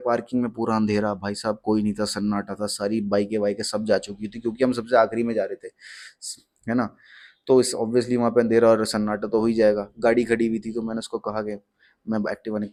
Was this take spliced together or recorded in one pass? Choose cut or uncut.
uncut